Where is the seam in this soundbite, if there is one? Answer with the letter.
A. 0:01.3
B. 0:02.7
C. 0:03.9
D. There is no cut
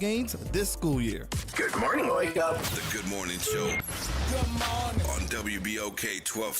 A